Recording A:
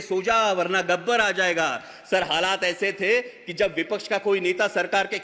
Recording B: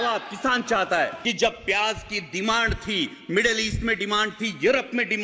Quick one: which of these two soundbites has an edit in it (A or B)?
B